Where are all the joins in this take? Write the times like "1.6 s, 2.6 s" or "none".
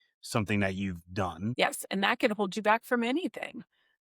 1.5 s